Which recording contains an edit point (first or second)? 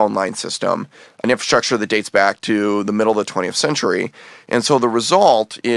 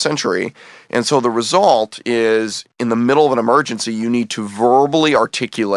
first